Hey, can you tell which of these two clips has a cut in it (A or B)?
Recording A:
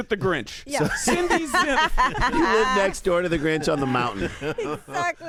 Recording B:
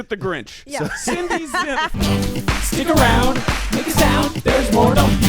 B